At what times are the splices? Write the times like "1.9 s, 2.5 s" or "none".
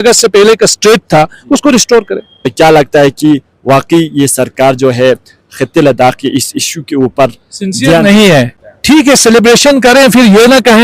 2.5 s, 8.6 s